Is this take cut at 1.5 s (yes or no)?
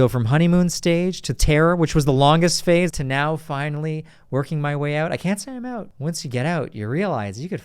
no